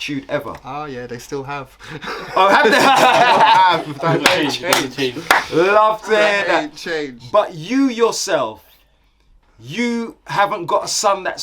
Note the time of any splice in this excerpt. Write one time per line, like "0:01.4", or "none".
none